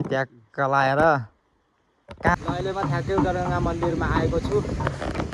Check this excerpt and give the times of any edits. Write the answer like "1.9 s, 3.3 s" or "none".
2.3 s